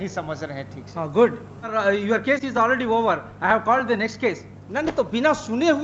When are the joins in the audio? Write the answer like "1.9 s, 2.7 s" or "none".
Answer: 1.7 s